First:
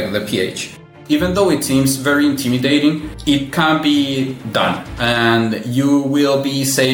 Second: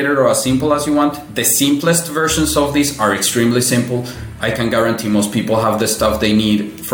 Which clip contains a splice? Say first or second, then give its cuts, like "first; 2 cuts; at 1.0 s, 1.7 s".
first; 2 cuts; at 0.9 s, 3.1 s